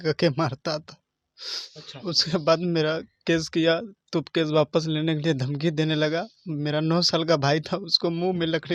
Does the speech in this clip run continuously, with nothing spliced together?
yes; 0 cuts

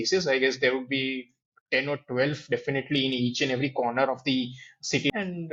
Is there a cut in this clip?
no; 0 cuts

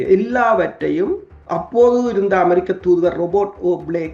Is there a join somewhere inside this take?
no; 0 cuts

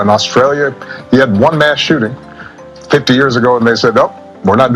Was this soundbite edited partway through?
no; 0 cuts

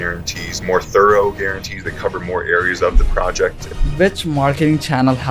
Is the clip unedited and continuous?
no; 1 cut; at 3.6 s

